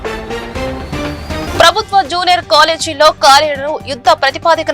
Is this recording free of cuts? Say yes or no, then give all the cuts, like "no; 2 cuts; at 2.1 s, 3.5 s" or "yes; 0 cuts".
no; 1 cut; at 1.5 s